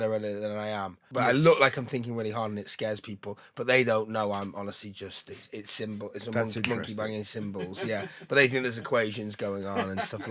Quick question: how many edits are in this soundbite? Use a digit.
1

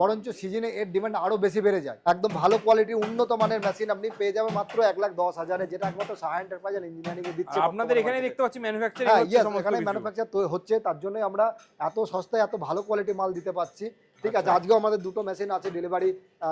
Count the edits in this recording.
1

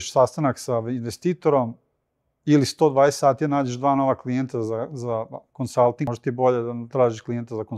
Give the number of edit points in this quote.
1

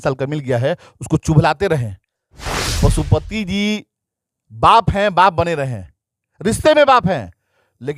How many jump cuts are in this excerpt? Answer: 1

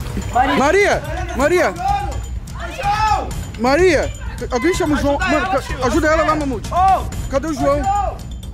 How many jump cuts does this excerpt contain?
0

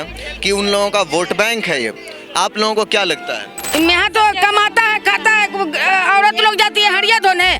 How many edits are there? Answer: 1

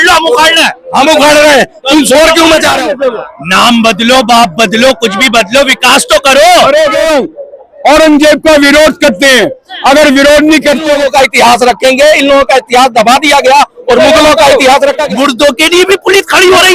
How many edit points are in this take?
4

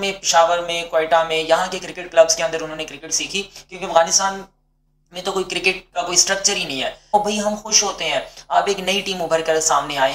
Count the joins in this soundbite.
1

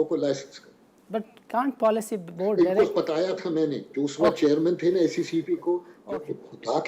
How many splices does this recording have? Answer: 1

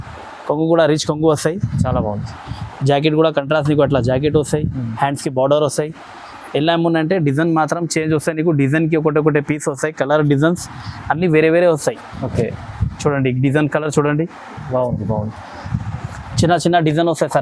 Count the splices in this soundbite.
0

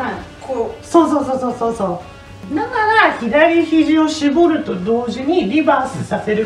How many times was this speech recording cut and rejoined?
1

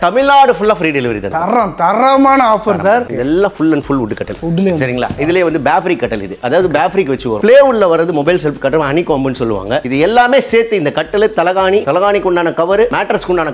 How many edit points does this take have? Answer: 4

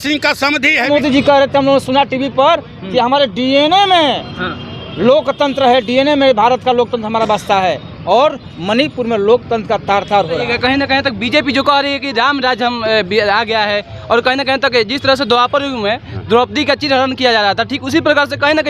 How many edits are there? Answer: 2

